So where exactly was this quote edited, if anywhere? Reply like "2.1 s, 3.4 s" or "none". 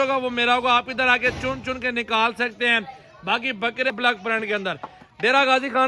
3.9 s

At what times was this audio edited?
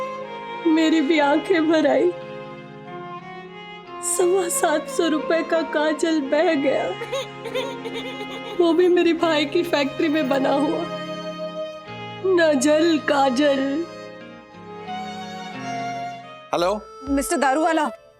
16.4 s

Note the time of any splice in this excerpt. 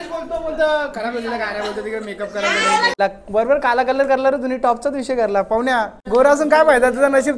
2.9 s, 6.0 s

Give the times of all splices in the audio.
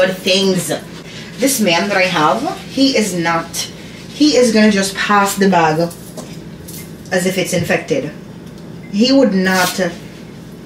1.1 s

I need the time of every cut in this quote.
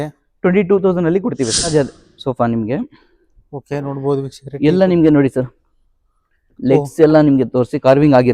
1.7 s

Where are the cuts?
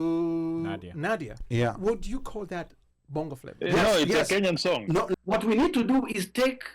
5.1 s

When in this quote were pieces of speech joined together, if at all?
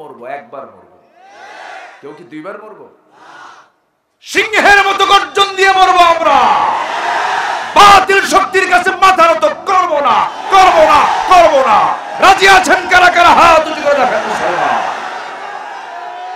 none

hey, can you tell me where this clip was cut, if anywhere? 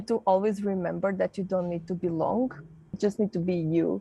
3.0 s

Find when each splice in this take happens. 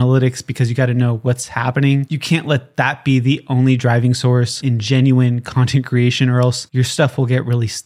2.1 s, 4.6 s

